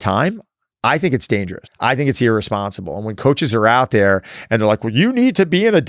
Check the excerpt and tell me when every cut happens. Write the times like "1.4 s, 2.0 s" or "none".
1.6 s

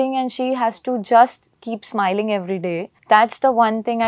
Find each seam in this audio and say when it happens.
2.9 s

